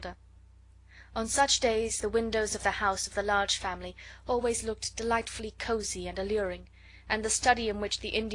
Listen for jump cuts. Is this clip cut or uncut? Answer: cut